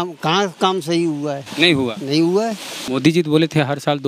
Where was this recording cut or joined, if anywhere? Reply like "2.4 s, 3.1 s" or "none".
2.8 s